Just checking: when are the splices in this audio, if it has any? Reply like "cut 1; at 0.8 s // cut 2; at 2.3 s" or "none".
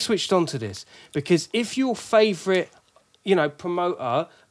none